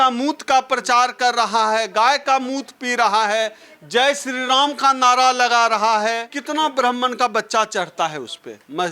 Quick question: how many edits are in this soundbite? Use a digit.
1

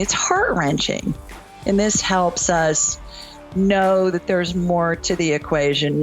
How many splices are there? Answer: 1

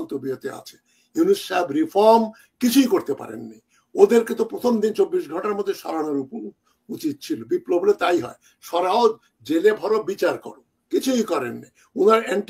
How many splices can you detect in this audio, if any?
0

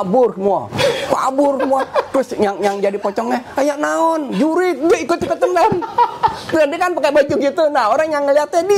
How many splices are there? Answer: 0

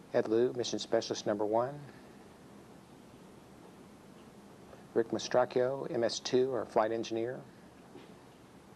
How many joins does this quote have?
1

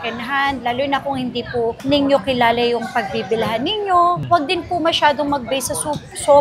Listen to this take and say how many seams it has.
0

